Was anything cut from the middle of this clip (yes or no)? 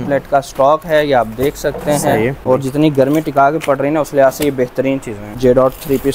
yes